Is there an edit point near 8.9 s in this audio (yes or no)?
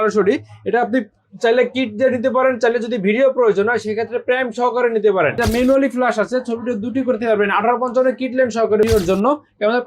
yes